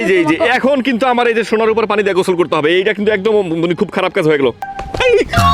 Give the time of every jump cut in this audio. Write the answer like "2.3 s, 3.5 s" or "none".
4.6 s